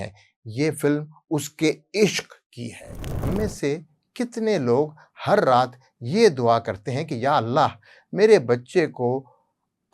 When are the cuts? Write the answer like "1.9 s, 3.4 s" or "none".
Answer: 3.2 s